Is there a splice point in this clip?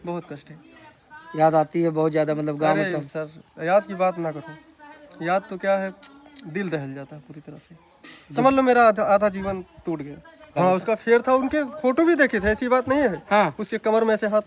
yes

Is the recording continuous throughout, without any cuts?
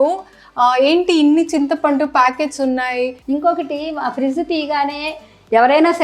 no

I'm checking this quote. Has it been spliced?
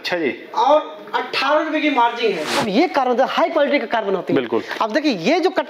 yes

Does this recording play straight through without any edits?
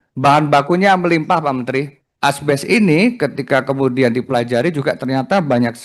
no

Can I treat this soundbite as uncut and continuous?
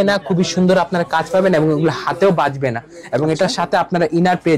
yes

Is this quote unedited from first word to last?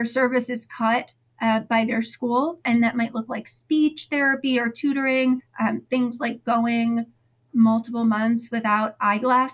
no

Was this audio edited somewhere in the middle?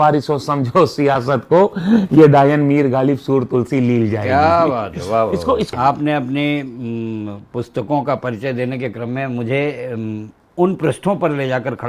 yes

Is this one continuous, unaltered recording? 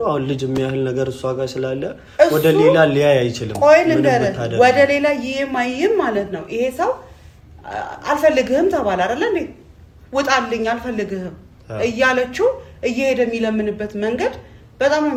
yes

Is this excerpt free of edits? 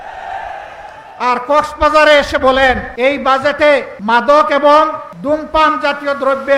no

